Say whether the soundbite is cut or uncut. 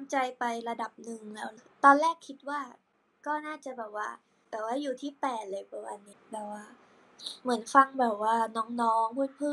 cut